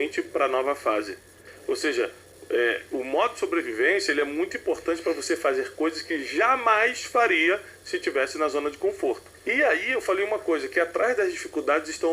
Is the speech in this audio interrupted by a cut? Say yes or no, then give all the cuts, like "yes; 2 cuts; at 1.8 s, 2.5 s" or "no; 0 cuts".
yes; 2 cuts; at 1.4 s, 9.3 s